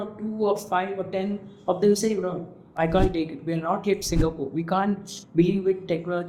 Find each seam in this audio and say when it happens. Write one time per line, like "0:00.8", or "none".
none